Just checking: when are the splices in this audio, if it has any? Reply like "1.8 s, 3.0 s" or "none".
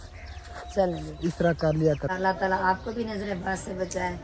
2.1 s